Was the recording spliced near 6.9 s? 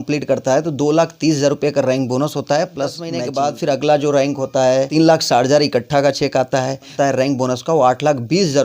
yes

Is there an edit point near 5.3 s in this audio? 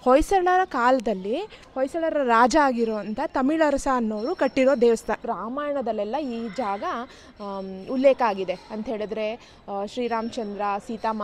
yes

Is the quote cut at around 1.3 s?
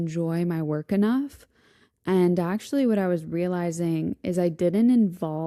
no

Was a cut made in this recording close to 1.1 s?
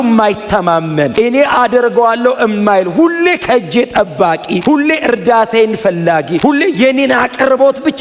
yes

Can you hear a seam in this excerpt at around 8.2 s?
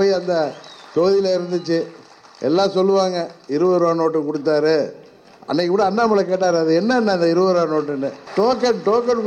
yes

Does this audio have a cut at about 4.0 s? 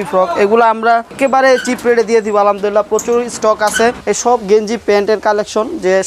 yes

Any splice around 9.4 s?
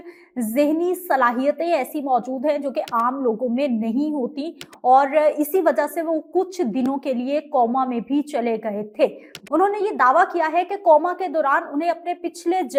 no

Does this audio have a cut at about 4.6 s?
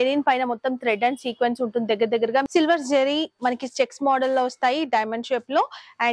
no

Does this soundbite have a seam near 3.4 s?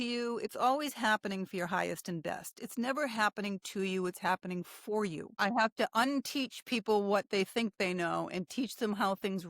no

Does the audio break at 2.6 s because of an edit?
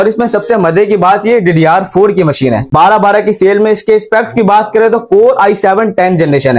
yes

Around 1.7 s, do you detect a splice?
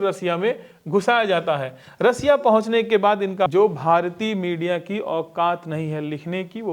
no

